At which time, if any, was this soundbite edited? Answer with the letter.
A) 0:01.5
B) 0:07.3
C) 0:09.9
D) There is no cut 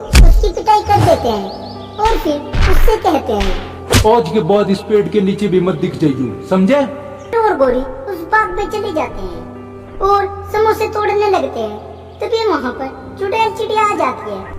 B